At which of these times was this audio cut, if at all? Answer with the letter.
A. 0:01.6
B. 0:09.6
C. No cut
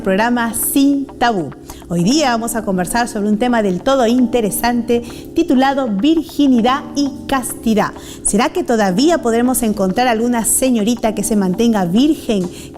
B